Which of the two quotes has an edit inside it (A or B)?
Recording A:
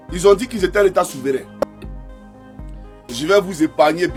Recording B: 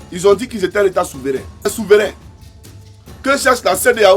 B